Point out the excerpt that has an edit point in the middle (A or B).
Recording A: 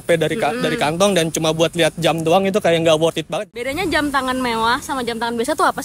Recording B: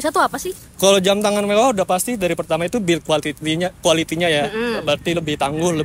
A